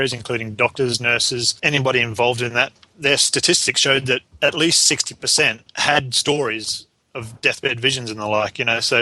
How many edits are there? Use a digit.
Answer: 4